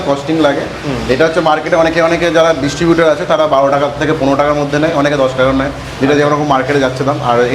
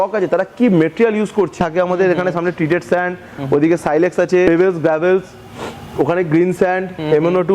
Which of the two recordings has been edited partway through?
second; 2 cuts; at 1.6 s, 4.5 s

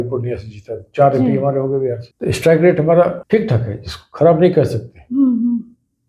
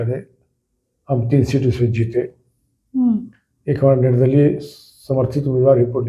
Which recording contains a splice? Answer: first; 2 cuts; at 2.1 s, 3.2 s

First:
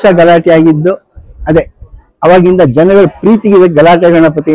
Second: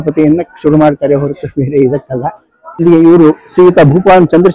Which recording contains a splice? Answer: second; 1 cut; at 2.8 s

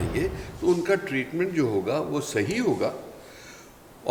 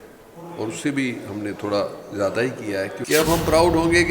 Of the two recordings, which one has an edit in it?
second; 1 cut; at 3.0 s

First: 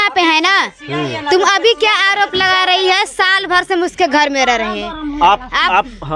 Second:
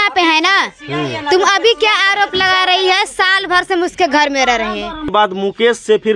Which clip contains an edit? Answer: second; 1 cut; at 5.1 s

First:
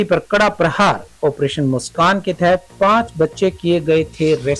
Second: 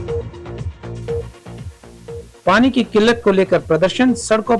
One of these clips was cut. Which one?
second; 1 cut; at 2.3 s

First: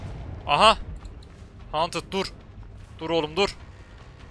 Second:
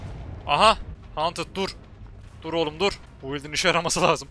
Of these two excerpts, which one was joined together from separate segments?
second; 2 cuts; at 1.0 s, 3.1 s

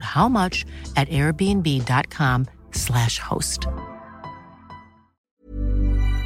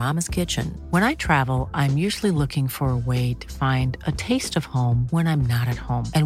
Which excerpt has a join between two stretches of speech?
first; 1 cut; at 5.3 s

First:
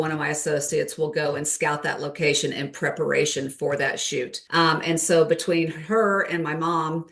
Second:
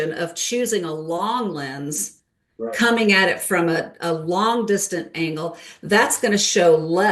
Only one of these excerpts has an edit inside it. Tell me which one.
first; 1 cut; at 4.4 s

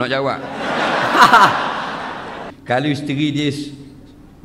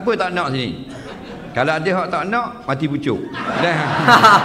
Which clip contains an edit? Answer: first; 1 cut; at 2.4 s

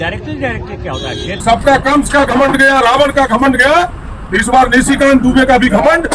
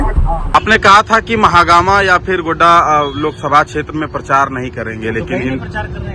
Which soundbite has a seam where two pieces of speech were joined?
first; 1 cut; at 1.3 s

